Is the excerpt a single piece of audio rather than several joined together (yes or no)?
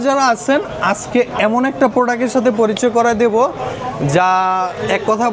yes